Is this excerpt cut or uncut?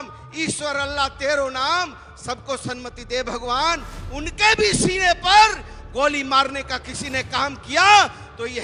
uncut